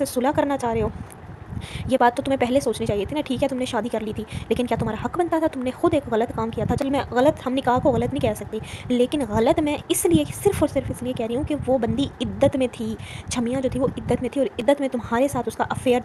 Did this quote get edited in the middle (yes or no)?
no